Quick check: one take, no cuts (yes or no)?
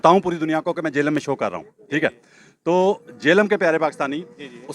yes